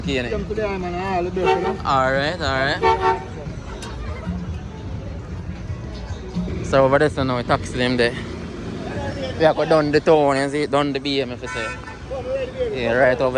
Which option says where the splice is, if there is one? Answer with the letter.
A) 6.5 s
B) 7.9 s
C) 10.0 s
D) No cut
A